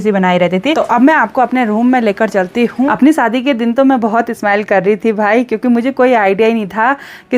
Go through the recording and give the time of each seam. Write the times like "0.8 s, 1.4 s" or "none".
0.8 s, 2.9 s